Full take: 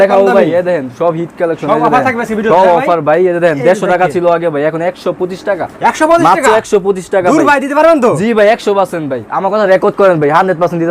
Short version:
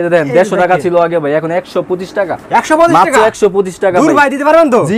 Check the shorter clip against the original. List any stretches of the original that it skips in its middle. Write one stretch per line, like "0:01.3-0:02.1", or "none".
none